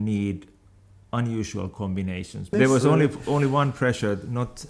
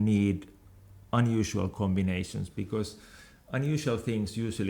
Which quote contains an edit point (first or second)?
first